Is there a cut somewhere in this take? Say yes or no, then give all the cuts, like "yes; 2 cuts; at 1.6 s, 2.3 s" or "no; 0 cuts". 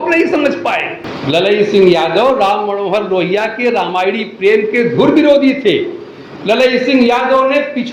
yes; 1 cut; at 1.1 s